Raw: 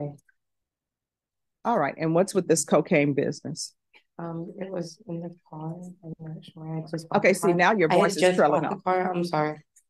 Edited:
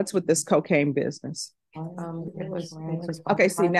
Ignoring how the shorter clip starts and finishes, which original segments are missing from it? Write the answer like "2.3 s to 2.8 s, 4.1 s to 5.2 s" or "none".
5.1 s to 6.7 s